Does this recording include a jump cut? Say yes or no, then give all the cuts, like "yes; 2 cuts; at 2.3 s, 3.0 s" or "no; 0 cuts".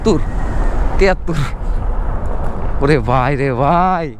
no; 0 cuts